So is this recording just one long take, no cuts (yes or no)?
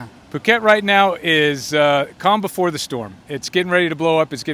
yes